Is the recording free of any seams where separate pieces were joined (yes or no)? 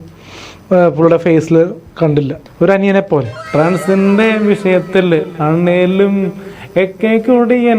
no